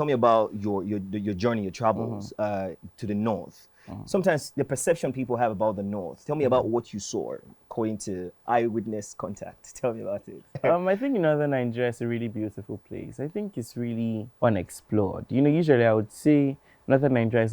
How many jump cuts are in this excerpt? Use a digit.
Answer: 1